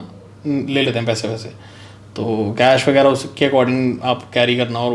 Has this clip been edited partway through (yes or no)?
no